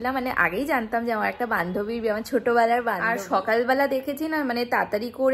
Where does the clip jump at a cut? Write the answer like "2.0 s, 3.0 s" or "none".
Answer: 3.1 s